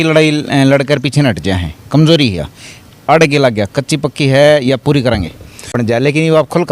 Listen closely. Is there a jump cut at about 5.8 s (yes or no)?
yes